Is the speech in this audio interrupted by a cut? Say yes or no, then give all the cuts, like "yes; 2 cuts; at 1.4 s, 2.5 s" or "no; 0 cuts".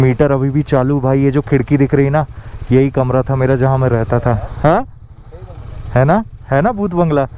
no; 0 cuts